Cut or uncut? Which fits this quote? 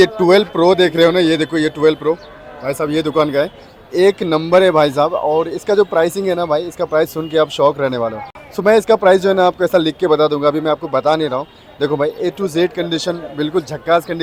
uncut